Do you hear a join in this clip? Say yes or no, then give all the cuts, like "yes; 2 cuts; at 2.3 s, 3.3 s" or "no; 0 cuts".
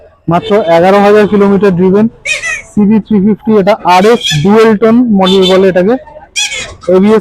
no; 0 cuts